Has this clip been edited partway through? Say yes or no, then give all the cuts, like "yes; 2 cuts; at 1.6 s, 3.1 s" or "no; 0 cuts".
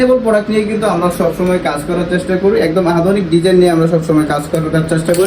no; 0 cuts